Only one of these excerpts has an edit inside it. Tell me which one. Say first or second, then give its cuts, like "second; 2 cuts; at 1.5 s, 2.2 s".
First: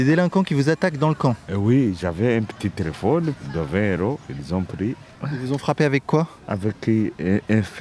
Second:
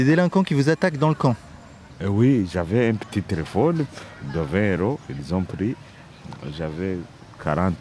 first; 4 cuts; at 1.5 s, 3.4 s, 5.1 s, 6.4 s